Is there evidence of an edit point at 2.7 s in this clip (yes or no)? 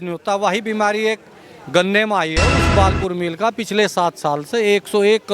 yes